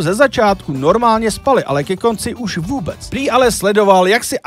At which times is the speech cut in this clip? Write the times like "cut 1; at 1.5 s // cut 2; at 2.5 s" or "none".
cut 1; at 3.0 s

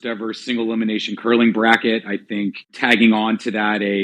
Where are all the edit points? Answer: cut 1; at 2.8 s

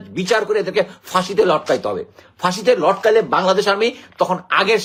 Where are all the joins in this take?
none

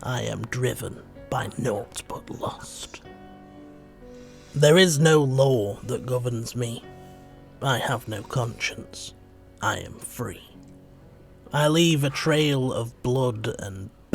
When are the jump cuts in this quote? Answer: cut 1; at 3.6 s

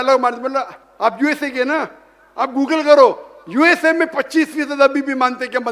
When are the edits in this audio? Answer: none

